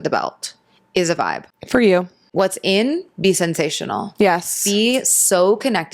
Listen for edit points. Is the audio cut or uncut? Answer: cut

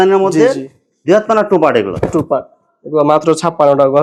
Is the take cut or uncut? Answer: uncut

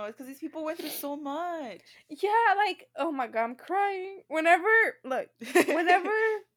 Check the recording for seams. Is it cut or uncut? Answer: uncut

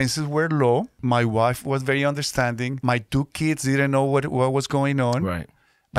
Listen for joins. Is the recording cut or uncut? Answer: cut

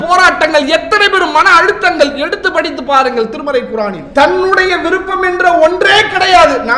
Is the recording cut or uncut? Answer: cut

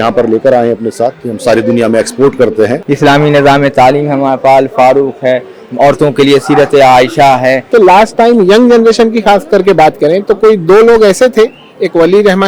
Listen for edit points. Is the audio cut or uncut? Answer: cut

